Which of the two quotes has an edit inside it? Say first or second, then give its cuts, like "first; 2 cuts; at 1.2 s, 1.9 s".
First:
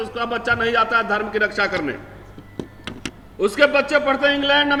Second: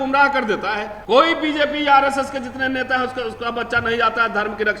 second; 1 cut; at 0.9 s